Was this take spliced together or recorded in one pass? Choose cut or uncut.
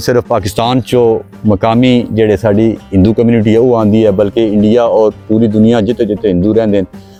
uncut